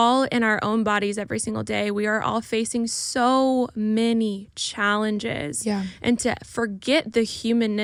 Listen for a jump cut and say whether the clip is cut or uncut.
uncut